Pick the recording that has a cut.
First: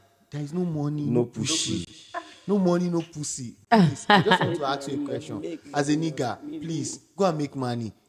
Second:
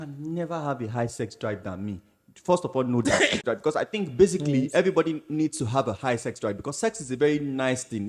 second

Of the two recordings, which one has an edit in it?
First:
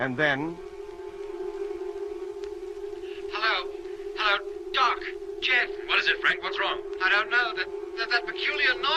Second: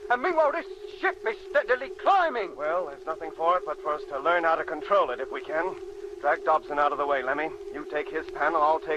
first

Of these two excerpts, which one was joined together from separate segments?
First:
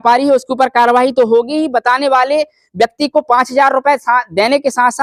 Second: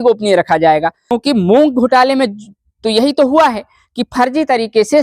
second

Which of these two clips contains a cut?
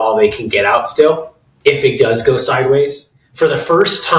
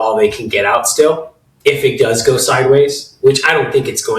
first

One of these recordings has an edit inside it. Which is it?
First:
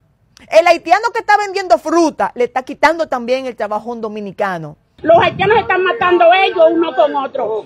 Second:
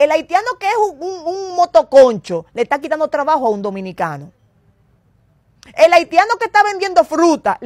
first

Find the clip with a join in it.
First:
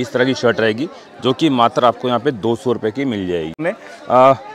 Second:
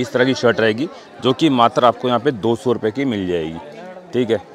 first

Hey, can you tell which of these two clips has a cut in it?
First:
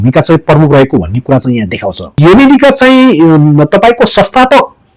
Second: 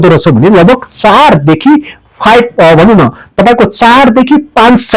first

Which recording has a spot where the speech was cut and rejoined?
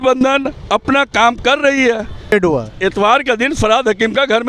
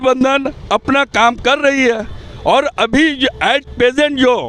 first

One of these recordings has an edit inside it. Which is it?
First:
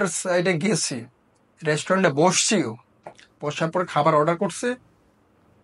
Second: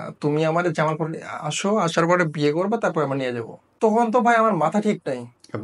second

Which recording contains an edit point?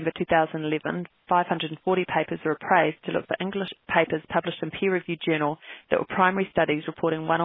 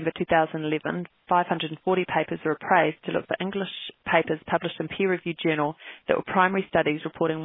first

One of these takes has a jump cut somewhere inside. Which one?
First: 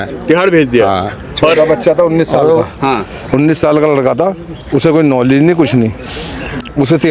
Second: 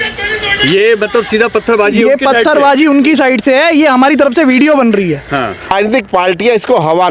second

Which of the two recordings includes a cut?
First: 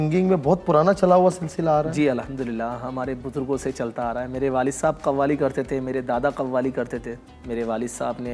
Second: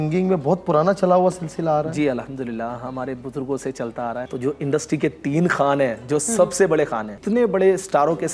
second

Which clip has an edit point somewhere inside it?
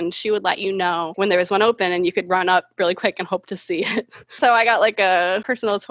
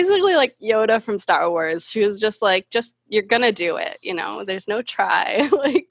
first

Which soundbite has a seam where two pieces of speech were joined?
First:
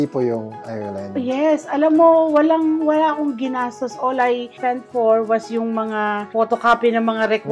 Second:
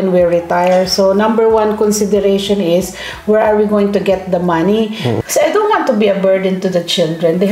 second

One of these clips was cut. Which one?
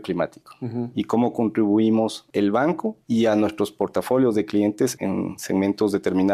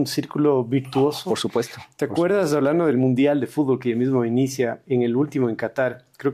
first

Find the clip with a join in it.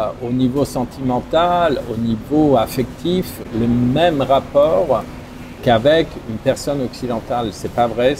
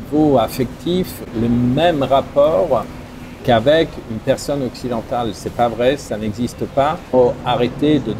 second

